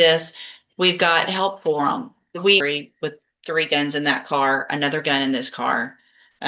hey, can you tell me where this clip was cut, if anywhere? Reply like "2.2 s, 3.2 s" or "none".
2.6 s